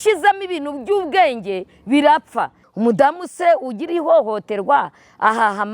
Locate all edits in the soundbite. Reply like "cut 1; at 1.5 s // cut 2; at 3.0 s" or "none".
cut 1; at 2.6 s